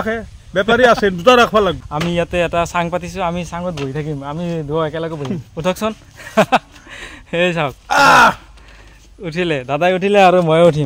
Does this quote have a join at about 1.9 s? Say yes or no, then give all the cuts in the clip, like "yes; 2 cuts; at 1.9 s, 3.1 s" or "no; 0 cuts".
yes; 1 cut; at 1.9 s